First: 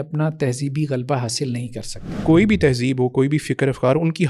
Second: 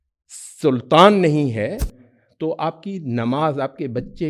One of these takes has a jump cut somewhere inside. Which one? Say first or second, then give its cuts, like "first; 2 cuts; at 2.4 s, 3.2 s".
first; 1 cut; at 2.1 s